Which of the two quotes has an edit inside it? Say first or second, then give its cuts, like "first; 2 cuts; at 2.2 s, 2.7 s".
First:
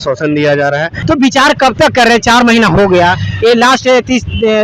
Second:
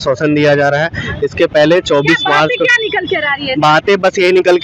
first; 1 cut; at 0.9 s